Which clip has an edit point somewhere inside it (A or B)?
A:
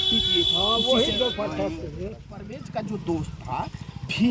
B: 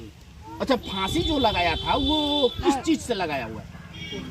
A